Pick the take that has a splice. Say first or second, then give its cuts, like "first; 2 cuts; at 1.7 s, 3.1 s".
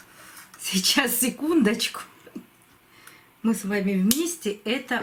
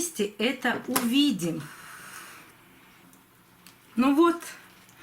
second; 1 cut; at 3.0 s